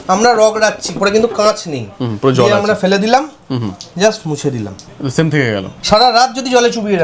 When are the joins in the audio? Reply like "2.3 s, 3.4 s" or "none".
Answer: 1.0 s, 4.8 s, 5.7 s